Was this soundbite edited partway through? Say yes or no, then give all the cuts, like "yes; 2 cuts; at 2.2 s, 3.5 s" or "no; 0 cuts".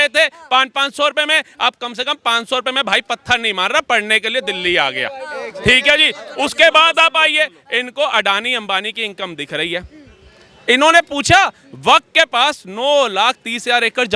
no; 0 cuts